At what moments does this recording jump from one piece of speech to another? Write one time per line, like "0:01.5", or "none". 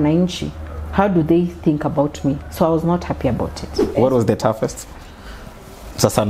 0:03.8